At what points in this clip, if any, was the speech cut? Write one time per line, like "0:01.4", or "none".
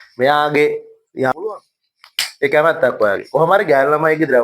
0:01.3